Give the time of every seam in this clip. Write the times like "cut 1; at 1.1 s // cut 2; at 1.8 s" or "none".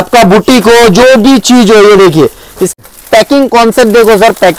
cut 1; at 2.7 s